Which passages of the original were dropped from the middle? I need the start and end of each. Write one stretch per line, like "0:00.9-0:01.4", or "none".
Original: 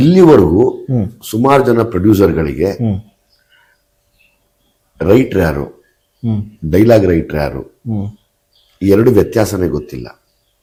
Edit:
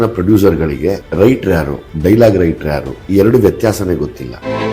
0:02.8-0:04.9
0:05.7-0:06.5
0:07.6-0:08.7